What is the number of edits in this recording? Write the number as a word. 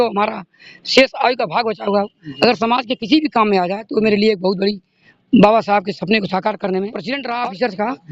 one